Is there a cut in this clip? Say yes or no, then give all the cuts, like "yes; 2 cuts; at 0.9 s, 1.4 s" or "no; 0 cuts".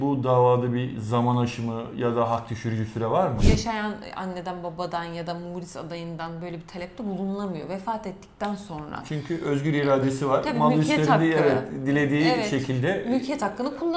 yes; 1 cut; at 3.4 s